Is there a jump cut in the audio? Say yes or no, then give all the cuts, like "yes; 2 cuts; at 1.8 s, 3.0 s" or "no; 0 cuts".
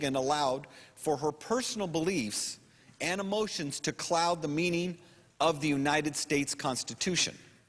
yes; 1 cut; at 2.2 s